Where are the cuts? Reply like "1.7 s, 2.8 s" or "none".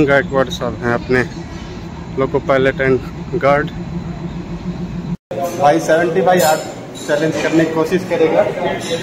5.3 s

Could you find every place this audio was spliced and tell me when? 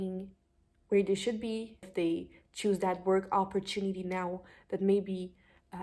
1.9 s

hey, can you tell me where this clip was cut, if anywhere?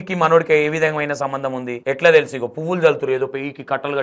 1.7 s

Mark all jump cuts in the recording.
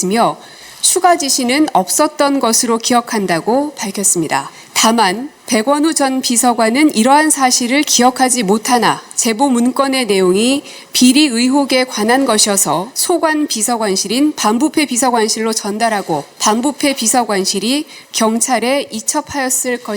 4.6 s, 5.3 s, 9.1 s, 12.9 s, 16.3 s

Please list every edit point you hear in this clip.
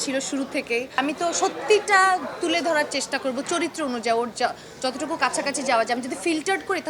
1.0 s

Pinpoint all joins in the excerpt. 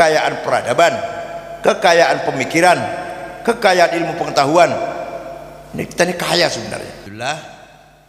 7.0 s

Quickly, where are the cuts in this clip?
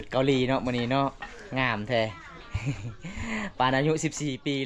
none

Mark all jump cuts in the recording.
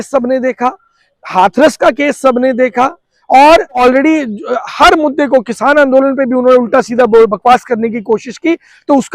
3.8 s

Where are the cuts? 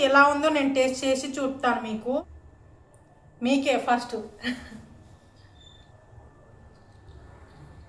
2.2 s, 5.8 s

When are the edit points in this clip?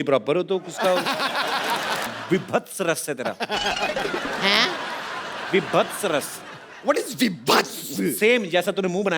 2.1 s

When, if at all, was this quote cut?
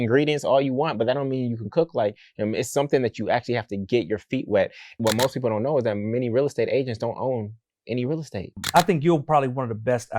5.0 s, 8.6 s

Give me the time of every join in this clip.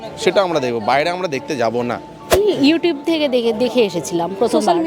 2.3 s

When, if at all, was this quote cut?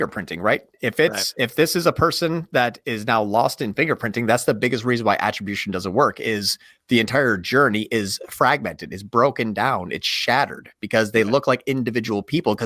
none

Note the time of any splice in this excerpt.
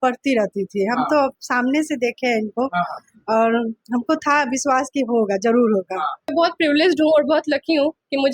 6.3 s

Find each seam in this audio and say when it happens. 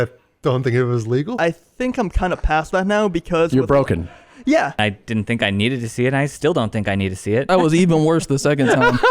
1.4 s, 4.8 s, 7.5 s

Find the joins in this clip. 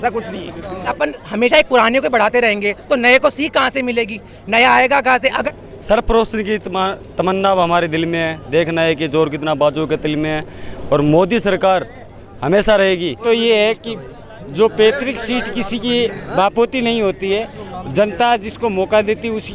0.9 s, 5.4 s, 13.2 s

